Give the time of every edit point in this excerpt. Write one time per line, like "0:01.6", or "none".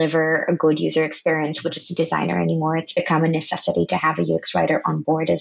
none